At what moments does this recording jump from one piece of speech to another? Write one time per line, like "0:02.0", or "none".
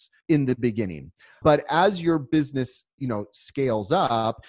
0:01.4